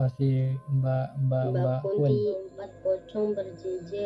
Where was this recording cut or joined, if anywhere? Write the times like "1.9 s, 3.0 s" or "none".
2.5 s